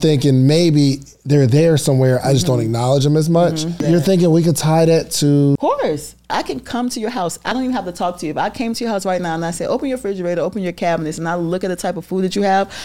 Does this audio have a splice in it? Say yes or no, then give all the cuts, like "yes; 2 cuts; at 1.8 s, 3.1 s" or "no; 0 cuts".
yes; 3 cuts; at 3.8 s, 5.8 s, 7.5 s